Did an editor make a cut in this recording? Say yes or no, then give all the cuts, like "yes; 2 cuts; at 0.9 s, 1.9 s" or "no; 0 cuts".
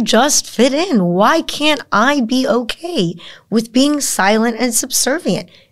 no; 0 cuts